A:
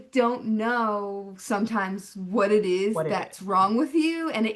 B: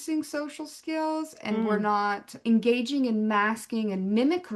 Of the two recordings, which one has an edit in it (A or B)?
B